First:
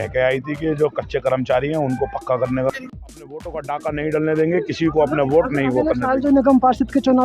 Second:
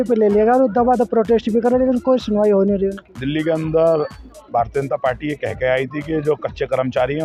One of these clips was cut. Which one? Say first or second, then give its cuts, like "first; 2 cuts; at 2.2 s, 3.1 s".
first; 1 cut; at 2.7 s